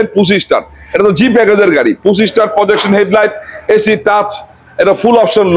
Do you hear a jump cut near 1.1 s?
no; 0 cuts

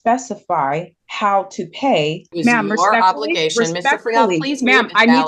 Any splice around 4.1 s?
no; 2 cuts; at 1.0 s, 2.3 s

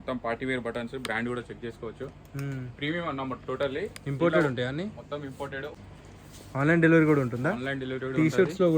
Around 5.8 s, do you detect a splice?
yes; 1 cut; at 5.8 s

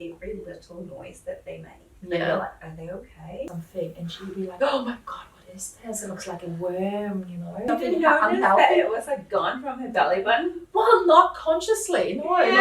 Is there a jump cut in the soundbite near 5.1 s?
no; 2 cuts; at 3.5 s, 7.7 s

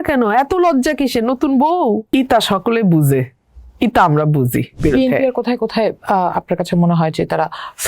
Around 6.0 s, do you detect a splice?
no; 2 cuts; at 2.0 s, 4.7 s

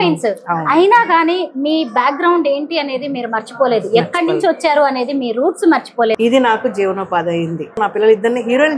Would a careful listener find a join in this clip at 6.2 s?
yes; 2 cuts; at 6.2 s, 7.8 s

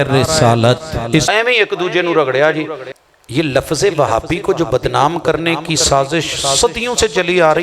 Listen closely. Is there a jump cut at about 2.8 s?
yes; 2 cuts; at 1.3 s, 2.8 s

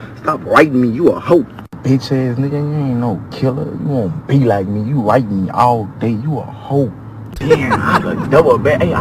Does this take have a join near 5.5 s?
yes; 1 cut; at 5.5 s

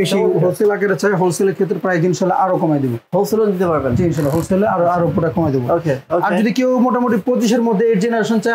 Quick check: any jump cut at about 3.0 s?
no; 0 cuts

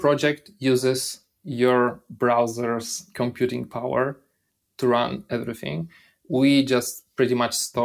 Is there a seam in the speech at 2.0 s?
no; 0 cuts

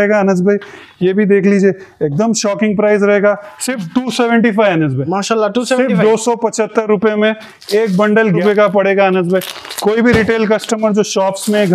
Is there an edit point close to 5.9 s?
no; 1 cut; at 8.4 s

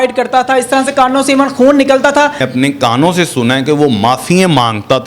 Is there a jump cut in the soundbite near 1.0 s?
no; 1 cut; at 2.5 s

